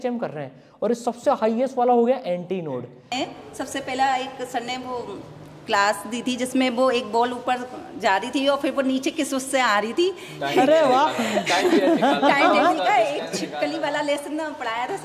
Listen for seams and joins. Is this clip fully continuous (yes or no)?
no